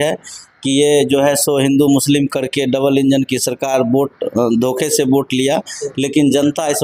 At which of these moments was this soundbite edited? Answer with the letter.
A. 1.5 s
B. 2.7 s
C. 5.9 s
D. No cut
D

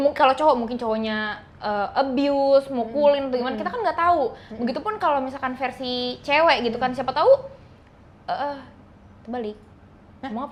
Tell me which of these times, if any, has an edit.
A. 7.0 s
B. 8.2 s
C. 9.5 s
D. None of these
D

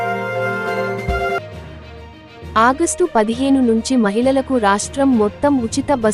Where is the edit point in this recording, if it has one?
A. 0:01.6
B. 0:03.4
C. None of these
A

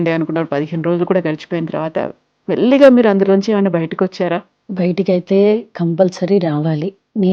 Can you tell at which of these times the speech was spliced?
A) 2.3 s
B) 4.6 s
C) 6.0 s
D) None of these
B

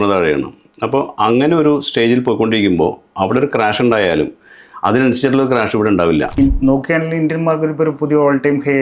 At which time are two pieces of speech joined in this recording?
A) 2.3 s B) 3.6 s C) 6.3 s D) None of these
C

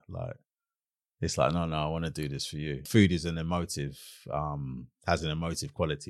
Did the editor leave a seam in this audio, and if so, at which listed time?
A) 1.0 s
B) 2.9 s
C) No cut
B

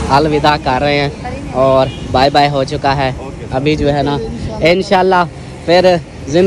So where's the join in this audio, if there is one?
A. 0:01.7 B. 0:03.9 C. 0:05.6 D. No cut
D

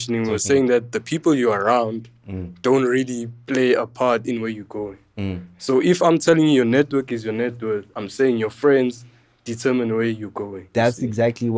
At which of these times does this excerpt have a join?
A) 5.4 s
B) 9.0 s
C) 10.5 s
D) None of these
D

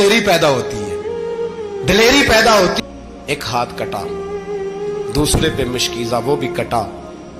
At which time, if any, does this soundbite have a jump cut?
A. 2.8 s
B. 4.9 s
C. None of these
A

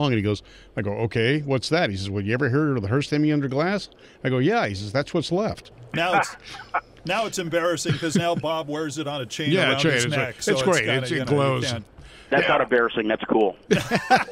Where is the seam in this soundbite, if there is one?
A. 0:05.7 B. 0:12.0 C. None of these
A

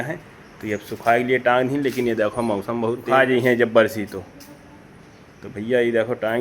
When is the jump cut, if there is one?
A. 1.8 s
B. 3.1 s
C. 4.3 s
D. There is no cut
B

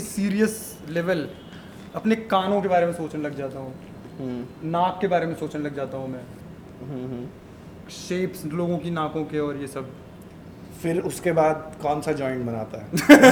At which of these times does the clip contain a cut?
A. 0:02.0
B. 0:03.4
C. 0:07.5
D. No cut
D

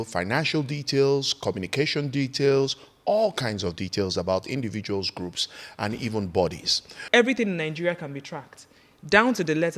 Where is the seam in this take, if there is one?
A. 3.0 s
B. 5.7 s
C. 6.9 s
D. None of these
C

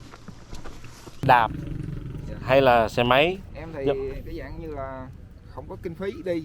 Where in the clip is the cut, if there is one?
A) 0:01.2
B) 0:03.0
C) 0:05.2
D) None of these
A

